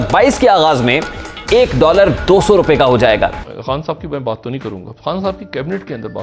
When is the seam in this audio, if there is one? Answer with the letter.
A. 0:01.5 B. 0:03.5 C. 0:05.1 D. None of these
B